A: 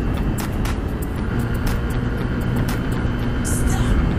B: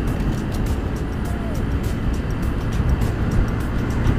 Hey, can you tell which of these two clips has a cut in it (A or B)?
A